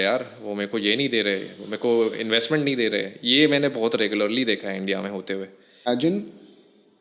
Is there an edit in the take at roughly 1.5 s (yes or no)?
no